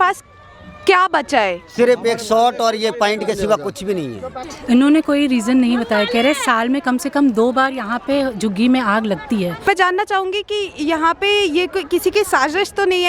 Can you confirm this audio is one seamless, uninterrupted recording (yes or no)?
no